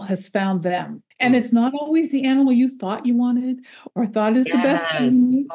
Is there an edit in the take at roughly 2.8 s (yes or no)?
no